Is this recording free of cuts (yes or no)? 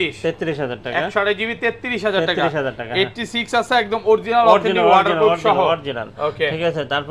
yes